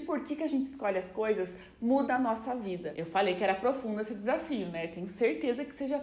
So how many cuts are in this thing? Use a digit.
1